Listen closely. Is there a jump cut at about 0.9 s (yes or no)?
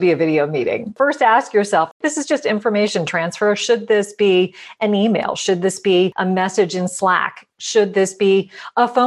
yes